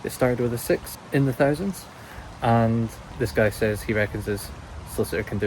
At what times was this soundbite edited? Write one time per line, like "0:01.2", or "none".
0:01.0
0:03.0